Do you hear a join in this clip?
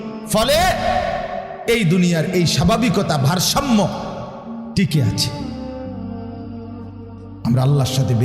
yes; 2 cuts; at 5.2 s, 6.7 s

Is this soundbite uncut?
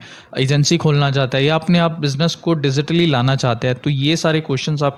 yes; 0 cuts

